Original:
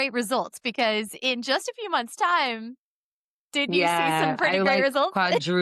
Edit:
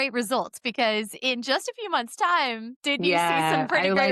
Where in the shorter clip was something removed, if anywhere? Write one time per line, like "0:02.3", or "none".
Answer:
0:02.7